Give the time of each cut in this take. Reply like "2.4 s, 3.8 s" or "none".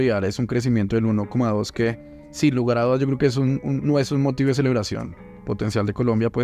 none